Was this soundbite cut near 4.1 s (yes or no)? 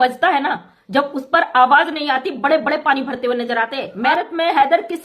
yes